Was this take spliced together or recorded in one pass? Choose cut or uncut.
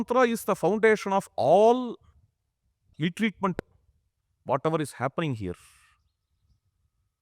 cut